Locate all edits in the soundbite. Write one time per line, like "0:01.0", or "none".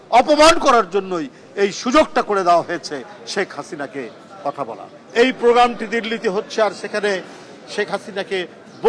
0:05.0